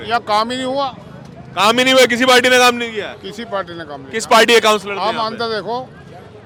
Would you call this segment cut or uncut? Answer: uncut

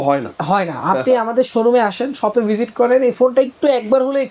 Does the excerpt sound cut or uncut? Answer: uncut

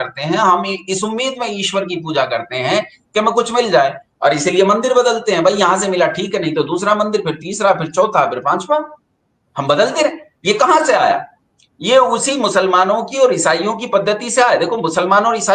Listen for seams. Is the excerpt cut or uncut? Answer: uncut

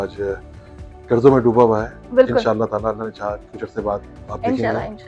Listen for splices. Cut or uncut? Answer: uncut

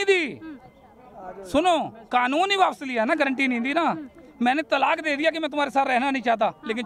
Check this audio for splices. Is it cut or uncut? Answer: uncut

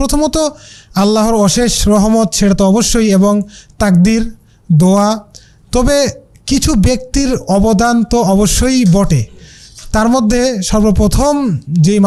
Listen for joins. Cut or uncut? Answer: uncut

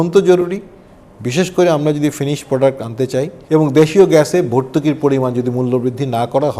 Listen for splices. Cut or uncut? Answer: cut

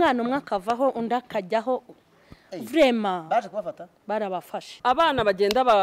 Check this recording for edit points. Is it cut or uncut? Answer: cut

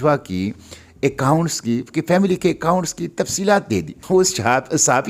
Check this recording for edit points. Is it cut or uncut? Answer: cut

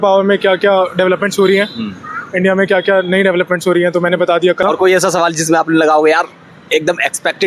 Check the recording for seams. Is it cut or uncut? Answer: cut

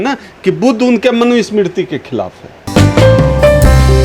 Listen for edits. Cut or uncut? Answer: uncut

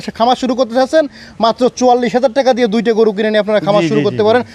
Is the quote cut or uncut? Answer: uncut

